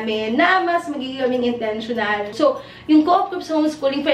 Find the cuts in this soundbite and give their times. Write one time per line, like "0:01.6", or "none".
0:02.3